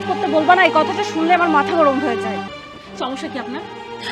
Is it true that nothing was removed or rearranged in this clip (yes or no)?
no